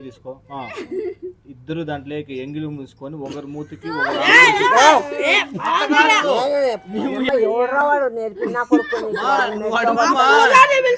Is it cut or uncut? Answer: cut